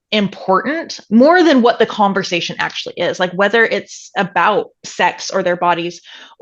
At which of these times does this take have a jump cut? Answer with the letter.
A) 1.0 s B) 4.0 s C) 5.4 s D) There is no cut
D